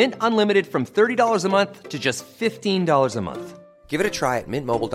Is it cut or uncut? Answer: uncut